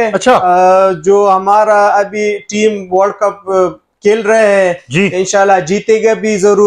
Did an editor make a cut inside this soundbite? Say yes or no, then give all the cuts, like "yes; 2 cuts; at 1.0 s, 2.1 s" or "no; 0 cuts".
no; 0 cuts